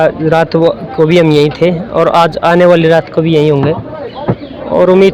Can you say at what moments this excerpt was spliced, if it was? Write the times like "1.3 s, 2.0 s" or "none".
none